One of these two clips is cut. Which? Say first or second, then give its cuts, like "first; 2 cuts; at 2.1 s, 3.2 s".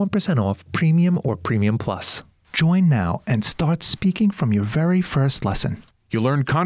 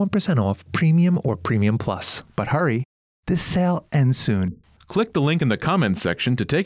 first; 1 cut; at 2.2 s